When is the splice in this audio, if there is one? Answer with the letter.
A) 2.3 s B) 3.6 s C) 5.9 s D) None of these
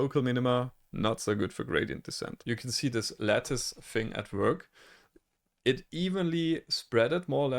A